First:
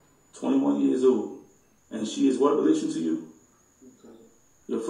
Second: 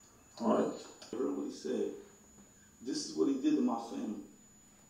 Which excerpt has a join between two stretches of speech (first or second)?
second